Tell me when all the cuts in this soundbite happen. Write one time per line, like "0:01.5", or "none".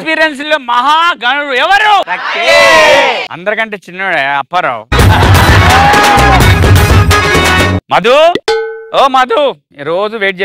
0:07.8